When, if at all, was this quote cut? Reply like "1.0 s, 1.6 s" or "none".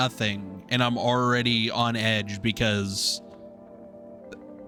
none